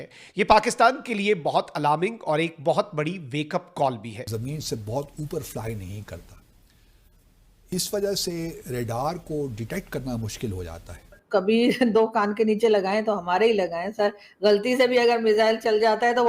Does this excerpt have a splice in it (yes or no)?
yes